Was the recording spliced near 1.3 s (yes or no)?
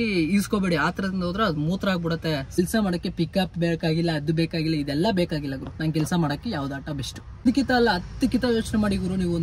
no